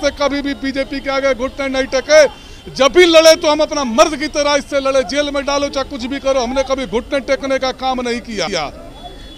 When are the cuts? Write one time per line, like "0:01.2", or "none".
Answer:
none